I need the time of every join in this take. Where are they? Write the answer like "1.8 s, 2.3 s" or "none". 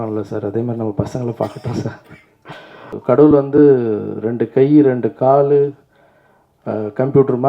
3.0 s